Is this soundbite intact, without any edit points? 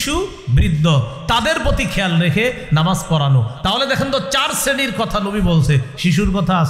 yes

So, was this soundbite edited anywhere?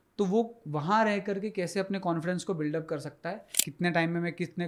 yes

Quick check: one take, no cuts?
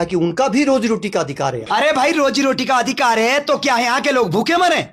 no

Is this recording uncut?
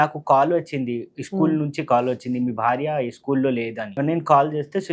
no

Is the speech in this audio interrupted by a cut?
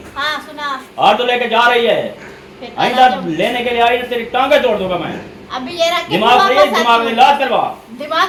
no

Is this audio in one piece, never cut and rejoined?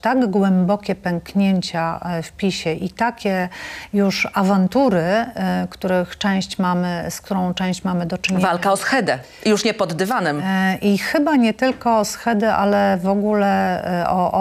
yes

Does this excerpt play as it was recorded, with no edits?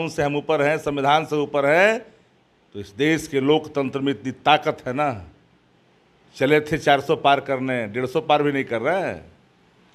yes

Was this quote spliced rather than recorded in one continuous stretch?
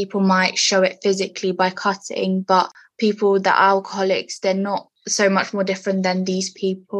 no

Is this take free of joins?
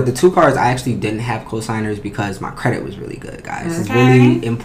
yes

